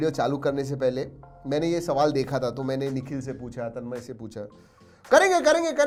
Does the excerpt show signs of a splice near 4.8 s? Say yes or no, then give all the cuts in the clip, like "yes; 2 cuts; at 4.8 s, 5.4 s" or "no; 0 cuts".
no; 0 cuts